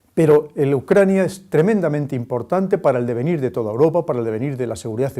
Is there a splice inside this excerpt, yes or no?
yes